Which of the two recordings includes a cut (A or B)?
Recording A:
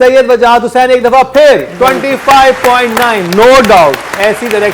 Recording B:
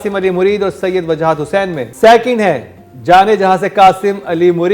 B